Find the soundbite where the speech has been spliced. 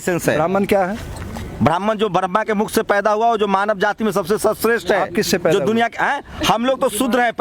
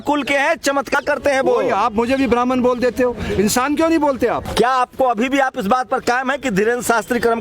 second; 2 cuts; at 1.0 s, 4.4 s

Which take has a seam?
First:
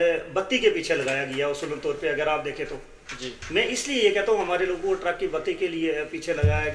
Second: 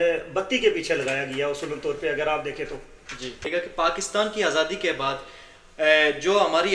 second; 1 cut; at 3.5 s

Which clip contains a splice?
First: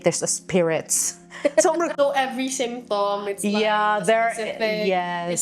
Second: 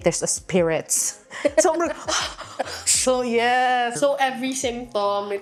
first; 1 cut; at 1.9 s

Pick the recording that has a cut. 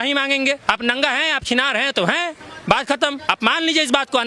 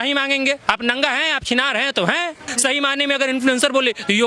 second; 1 cut; at 2.5 s

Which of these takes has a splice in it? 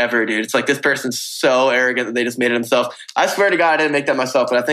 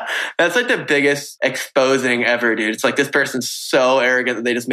second; 1 cut; at 1.3 s

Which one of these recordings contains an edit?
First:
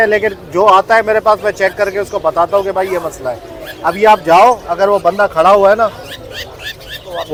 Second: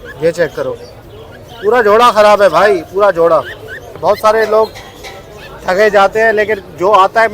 second; 1 cut; at 3.9 s

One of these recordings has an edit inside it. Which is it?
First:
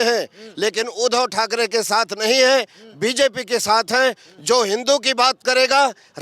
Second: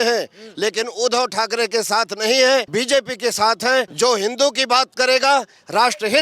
second; 2 cuts; at 2.7 s, 3.9 s

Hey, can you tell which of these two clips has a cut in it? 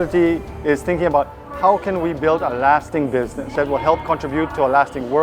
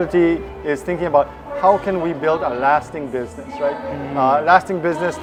first; 1 cut; at 3.5 s

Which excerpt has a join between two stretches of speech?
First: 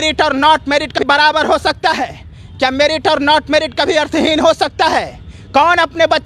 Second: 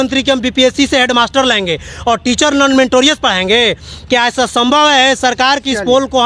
first; 1 cut; at 1.0 s

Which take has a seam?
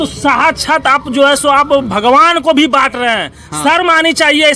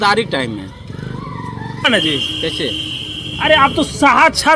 second; 1 cut; at 1.9 s

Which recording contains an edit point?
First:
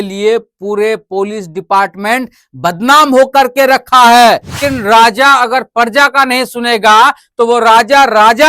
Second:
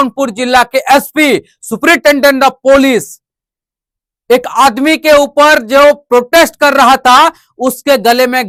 first; 1 cut; at 4.6 s

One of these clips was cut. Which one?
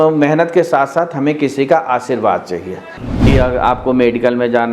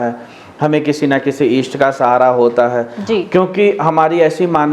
first; 1 cut; at 3.0 s

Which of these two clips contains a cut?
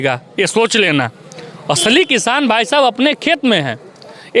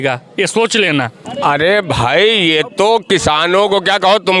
second; 1 cut; at 1.2 s

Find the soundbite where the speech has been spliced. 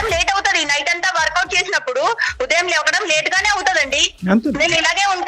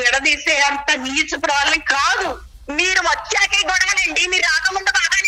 second; 1 cut; at 2.4 s

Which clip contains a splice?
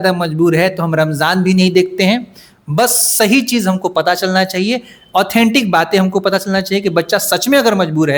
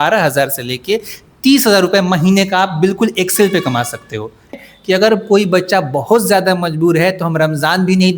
second; 1 cut; at 4.6 s

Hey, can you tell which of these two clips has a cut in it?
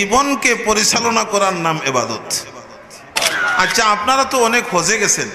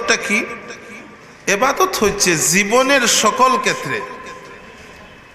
first; 1 cut; at 3.2 s

